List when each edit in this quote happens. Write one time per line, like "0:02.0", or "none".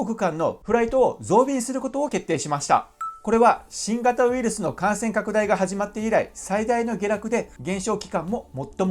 0:03.1
0:07.5